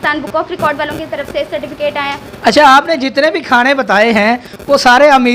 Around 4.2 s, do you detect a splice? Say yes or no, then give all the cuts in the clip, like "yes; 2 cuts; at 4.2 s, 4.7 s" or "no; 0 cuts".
no; 1 cut; at 2.3 s